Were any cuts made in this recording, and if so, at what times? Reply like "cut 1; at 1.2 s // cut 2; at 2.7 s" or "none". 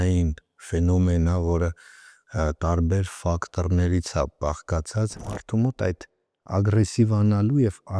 cut 1; at 5.3 s